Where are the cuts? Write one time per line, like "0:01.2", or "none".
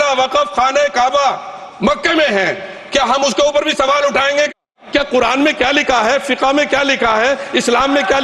0:04.6